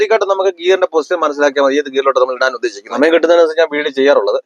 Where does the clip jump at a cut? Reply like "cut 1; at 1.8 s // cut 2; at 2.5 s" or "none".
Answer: cut 1; at 2.8 s